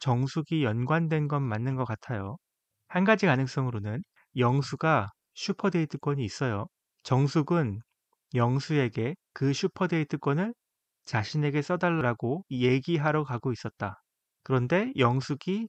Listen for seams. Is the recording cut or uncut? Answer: cut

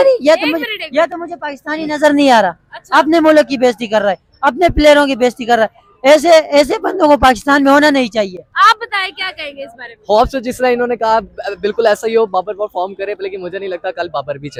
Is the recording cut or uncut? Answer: uncut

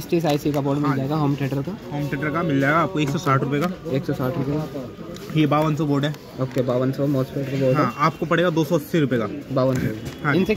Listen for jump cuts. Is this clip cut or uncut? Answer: uncut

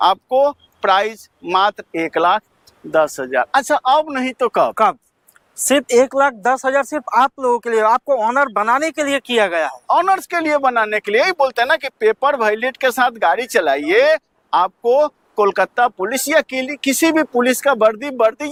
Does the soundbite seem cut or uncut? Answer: uncut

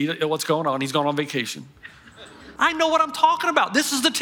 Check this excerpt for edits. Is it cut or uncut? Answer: cut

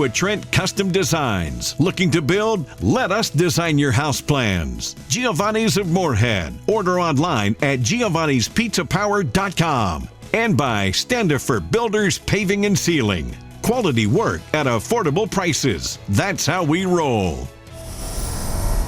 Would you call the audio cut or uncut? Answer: cut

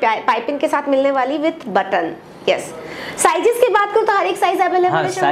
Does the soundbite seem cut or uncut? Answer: uncut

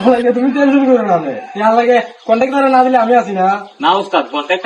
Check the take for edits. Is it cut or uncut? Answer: uncut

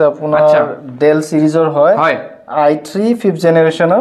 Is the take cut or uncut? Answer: uncut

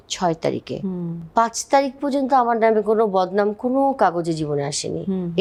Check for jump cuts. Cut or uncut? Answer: uncut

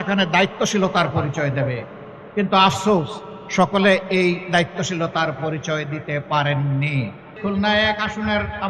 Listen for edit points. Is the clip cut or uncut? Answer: cut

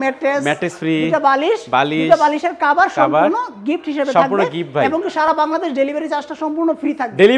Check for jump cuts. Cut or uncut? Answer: uncut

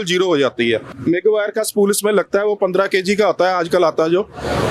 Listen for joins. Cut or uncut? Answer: uncut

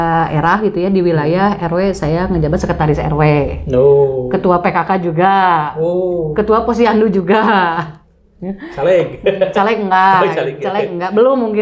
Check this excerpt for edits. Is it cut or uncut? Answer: uncut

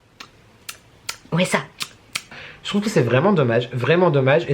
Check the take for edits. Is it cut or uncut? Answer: cut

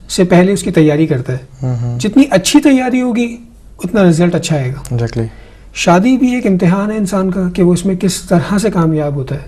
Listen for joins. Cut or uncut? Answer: cut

